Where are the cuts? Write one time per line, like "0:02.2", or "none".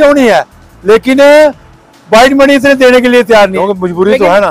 0:03.6